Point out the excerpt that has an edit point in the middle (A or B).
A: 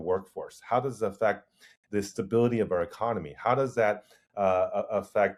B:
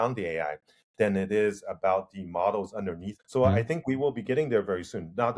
B